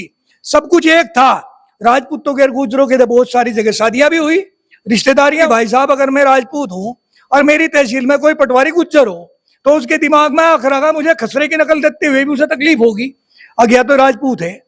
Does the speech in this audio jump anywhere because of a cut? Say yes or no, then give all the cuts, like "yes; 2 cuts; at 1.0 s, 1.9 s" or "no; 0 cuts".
yes; 1 cut; at 5.5 s